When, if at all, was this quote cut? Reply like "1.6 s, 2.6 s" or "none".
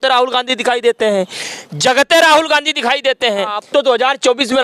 3.6 s